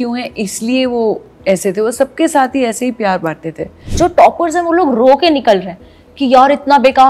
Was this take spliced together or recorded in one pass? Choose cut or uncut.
cut